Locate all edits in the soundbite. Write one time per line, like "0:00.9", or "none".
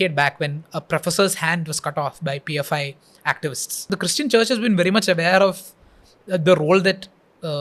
0:03.9